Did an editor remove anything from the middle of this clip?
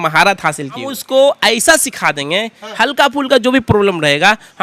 yes; 1 cut; at 1.0 s

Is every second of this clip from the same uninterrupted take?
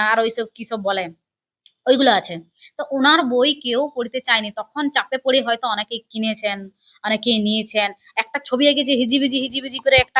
yes; 0 cuts

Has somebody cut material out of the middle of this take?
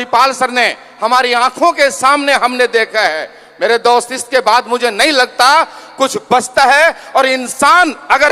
no; 0 cuts

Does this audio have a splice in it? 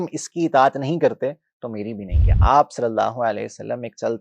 yes; 1 cut; at 2.3 s

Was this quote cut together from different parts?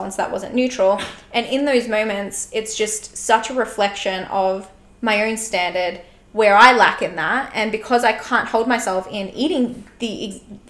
no; 0 cuts

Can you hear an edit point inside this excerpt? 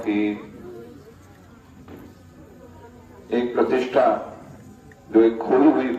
no; 0 cuts

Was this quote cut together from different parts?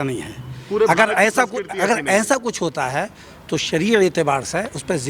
no; 0 cuts

